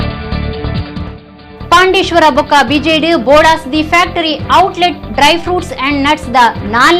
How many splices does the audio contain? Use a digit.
1